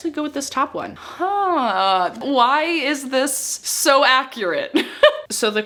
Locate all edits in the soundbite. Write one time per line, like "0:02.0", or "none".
none